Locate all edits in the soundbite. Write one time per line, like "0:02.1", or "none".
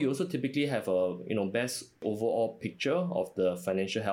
0:02.0